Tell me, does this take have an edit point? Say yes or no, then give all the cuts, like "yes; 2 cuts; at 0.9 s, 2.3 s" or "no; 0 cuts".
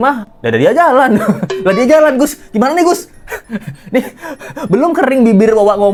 no; 0 cuts